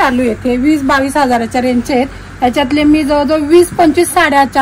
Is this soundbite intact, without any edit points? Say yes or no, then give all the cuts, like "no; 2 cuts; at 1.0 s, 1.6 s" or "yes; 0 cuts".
yes; 0 cuts